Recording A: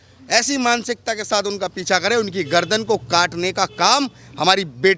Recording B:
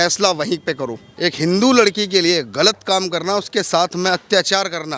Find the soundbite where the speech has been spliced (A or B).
B